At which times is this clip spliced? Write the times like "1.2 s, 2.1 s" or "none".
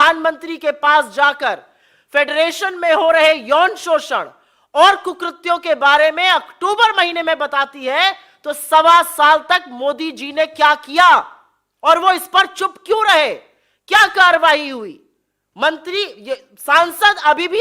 none